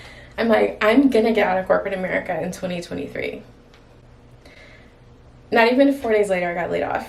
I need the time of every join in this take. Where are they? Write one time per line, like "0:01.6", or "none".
none